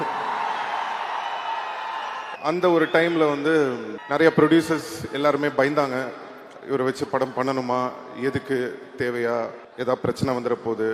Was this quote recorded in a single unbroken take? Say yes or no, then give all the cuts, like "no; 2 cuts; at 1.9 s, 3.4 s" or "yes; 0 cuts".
no; 3 cuts; at 2.3 s, 3.9 s, 9.6 s